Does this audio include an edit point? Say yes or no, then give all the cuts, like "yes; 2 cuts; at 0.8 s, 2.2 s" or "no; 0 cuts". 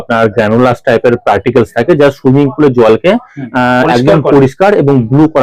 no; 0 cuts